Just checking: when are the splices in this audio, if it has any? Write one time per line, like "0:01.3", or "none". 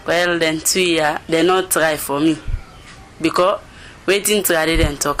none